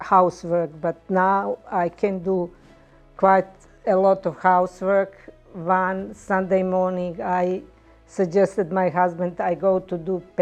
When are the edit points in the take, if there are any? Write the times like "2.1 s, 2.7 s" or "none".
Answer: none